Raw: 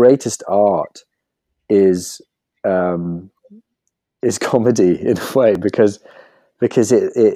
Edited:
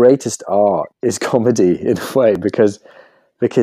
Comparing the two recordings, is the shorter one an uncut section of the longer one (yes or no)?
no